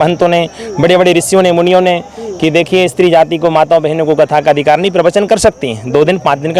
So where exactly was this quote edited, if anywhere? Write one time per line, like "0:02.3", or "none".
none